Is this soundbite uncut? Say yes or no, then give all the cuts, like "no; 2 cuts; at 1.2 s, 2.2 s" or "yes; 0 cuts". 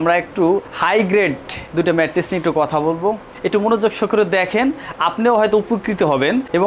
yes; 0 cuts